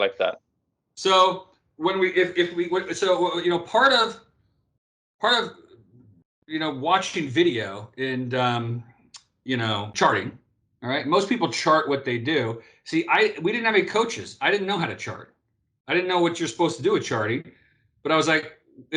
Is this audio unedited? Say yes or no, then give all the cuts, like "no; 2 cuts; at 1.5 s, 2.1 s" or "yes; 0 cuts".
no; 1 cut; at 9.9 s